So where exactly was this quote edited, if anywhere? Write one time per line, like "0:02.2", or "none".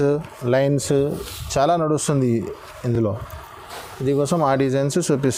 none